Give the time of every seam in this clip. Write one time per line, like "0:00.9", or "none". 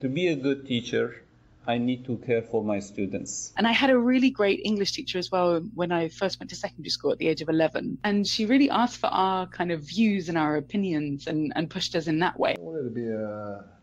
0:03.4
0:08.0
0:12.6